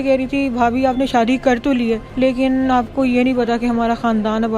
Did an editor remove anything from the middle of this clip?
yes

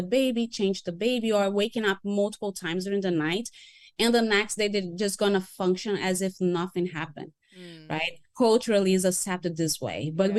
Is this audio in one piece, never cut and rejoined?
yes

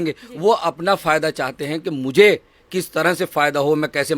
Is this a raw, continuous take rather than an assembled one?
yes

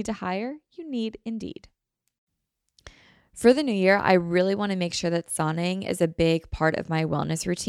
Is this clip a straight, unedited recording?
no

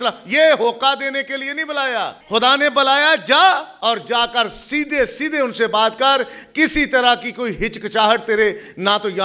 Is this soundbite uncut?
no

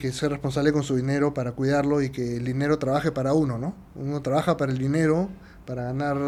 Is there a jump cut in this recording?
no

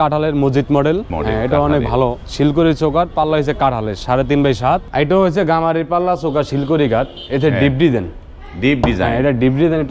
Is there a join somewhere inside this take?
yes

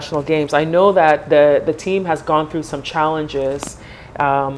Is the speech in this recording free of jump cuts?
yes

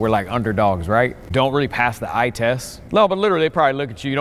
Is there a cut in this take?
yes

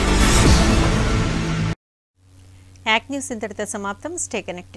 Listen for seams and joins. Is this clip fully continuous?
yes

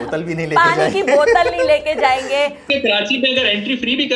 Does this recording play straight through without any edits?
no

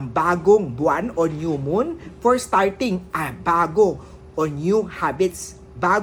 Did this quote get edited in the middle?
no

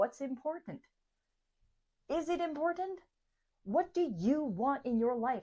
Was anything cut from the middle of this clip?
no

